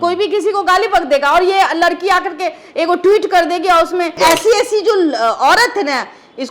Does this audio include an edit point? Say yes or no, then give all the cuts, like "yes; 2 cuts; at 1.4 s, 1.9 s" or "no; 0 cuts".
yes; 1 cut; at 4.2 s